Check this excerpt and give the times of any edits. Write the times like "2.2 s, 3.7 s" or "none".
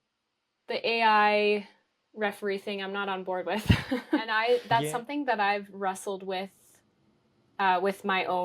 4.3 s